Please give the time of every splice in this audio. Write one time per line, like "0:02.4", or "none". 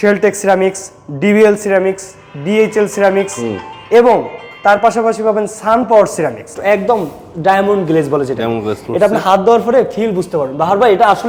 0:06.5

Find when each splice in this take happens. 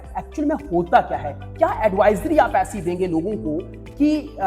none

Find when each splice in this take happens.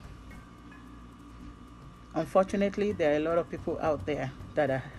none

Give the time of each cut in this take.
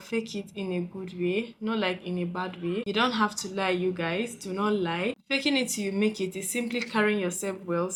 none

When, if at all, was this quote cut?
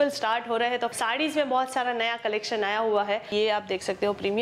0:00.9
0:03.3

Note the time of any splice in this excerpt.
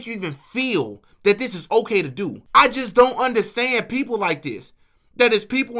0:02.4

